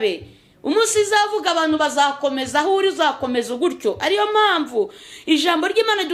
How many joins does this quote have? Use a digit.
0